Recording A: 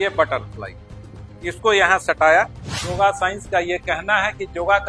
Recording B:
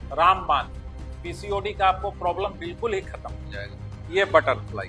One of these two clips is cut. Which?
A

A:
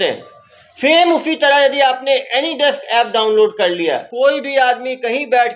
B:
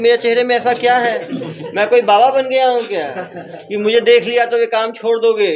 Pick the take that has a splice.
A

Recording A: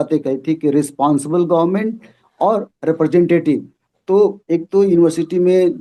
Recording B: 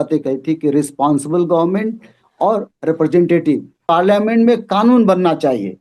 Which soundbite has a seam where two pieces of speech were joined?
B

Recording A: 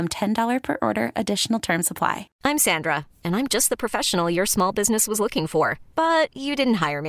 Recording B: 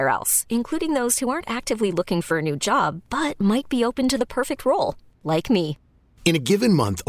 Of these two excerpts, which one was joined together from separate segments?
A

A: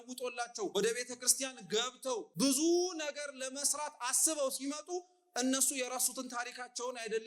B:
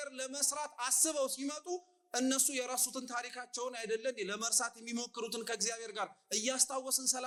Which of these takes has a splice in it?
A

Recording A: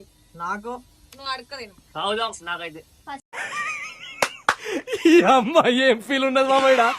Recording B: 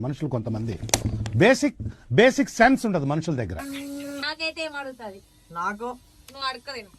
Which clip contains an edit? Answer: B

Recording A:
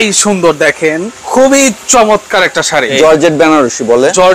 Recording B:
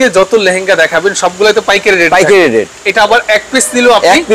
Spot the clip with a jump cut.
A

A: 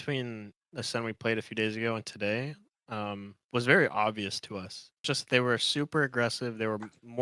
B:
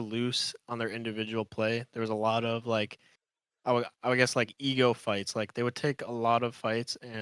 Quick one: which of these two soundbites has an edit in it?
A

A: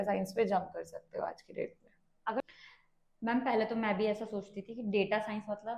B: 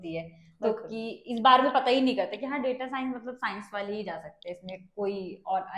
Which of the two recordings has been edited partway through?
A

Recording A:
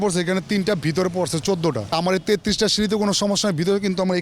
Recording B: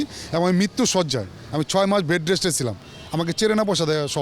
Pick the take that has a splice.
A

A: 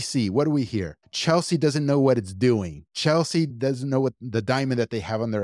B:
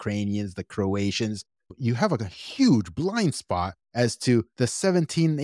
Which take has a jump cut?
B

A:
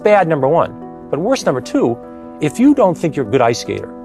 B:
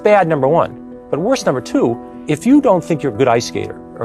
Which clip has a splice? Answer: B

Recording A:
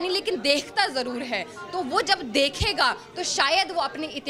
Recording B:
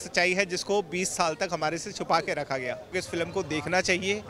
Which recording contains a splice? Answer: B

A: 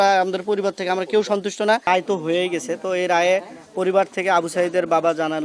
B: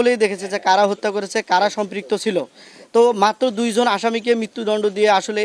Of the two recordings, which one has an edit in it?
A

